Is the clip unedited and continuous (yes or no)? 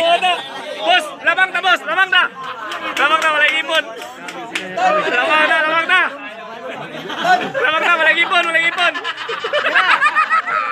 yes